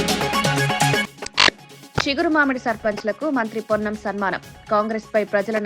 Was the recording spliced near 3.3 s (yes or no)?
no